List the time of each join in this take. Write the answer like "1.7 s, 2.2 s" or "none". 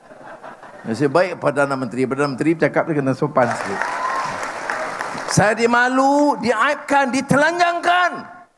3.5 s